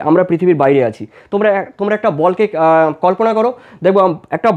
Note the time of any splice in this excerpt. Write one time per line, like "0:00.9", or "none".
none

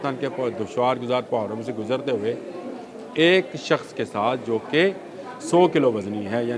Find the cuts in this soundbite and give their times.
none

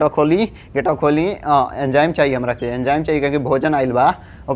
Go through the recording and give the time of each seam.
none

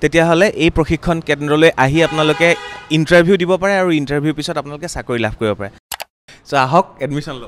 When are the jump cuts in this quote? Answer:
0:05.9

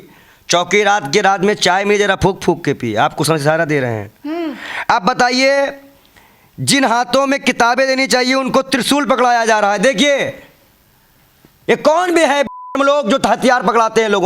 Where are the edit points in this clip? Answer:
none

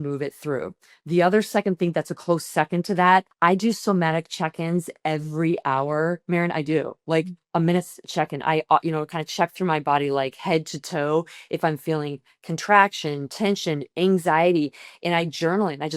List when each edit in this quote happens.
0:03.3

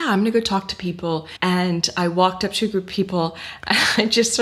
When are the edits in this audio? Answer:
0:01.3

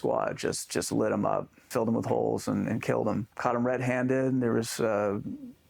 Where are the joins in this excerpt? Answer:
0:01.6
0:03.3

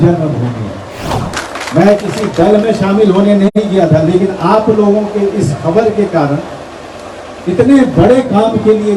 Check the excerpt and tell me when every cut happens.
0:01.3

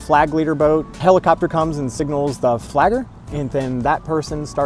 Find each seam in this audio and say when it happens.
0:00.9
0:02.6

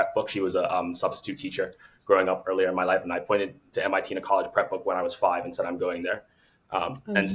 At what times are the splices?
none

